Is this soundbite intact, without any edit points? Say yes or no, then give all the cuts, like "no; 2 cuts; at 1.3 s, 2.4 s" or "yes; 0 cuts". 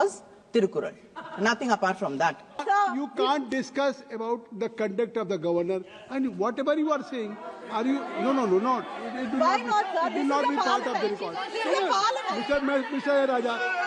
no; 1 cut; at 2.6 s